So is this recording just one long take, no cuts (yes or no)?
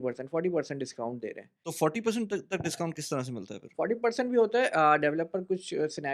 yes